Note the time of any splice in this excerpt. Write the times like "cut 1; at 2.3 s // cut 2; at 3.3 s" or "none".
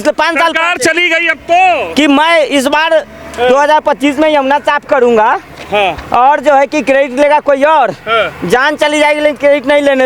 none

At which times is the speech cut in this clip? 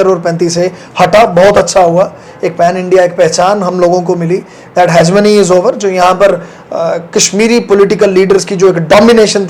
none

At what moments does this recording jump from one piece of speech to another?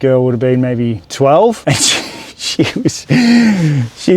cut 1; at 1.0 s // cut 2; at 1.6 s

